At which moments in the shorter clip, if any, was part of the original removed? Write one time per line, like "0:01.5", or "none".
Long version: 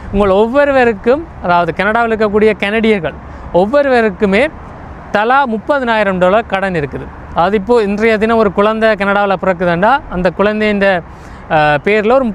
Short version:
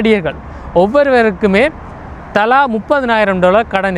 none